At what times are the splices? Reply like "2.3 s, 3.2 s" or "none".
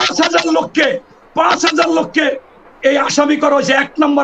none